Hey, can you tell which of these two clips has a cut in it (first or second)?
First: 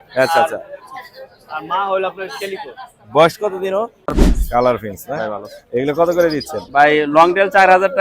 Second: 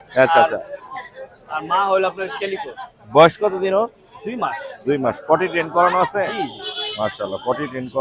first